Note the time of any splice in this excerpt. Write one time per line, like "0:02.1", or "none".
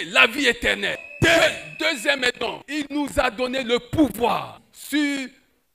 0:01.0
0:02.6
0:04.6